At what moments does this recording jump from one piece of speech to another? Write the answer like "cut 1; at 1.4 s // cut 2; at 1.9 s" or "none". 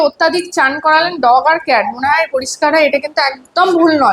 none